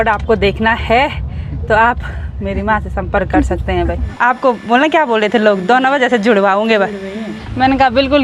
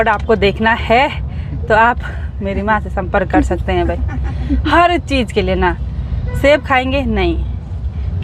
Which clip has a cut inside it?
first; 2 cuts; at 4.0 s, 7.3 s

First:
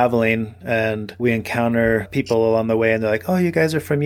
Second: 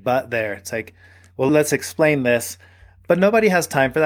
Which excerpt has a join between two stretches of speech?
first; 1 cut; at 1.1 s

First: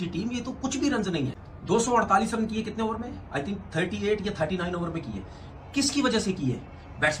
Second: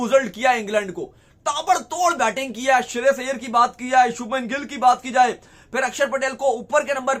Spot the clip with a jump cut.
first; 1 cut; at 1.5 s

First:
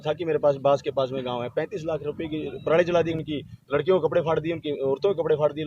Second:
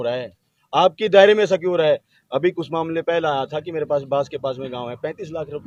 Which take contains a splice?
first; 1 cut; at 3.1 s

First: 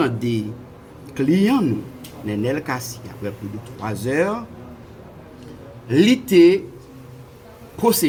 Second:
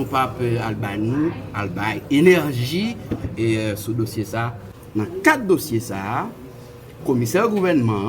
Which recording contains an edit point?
second; 1 cut; at 4.6 s

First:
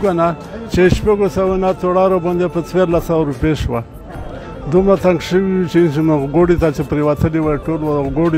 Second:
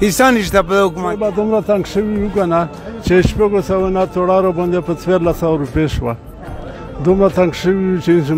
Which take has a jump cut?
second; 1 cut; at 1.2 s

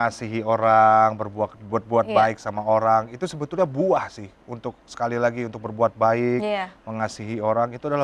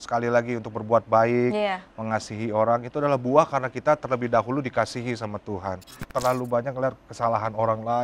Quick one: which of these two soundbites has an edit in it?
second; 1 cut; at 6.0 s

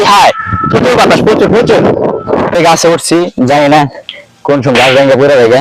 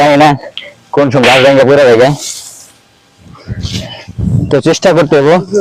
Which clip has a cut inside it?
first; 1 cut; at 2.6 s

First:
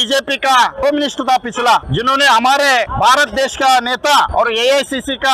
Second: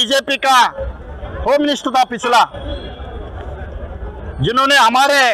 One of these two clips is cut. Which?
first; 4 cuts; at 0.8 s, 1.9 s, 2.9 s, 4.3 s

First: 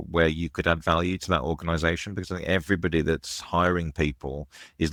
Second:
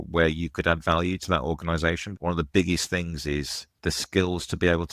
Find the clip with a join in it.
second; 2 cuts; at 2.1 s, 3.6 s

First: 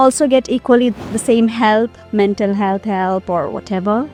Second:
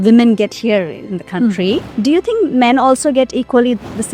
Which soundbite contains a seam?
second; 1 cut; at 1.9 s

